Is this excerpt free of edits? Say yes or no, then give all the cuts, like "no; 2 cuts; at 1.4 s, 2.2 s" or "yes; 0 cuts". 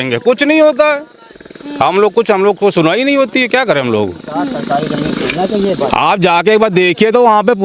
yes; 0 cuts